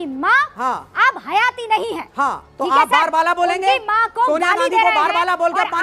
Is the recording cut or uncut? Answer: uncut